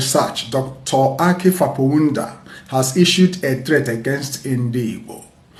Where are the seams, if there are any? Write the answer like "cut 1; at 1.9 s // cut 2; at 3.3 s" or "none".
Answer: none